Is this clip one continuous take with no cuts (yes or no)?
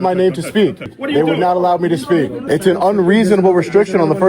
no